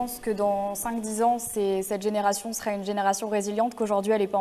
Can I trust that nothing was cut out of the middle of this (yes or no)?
yes